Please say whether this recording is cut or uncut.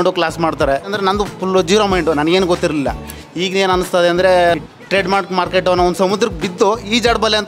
cut